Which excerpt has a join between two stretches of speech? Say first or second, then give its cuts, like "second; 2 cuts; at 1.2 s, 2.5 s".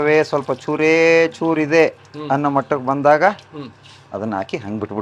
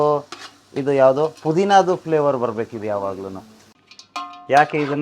second; 1 cut; at 3.6 s